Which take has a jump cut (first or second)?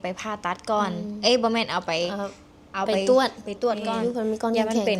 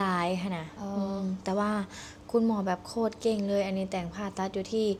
first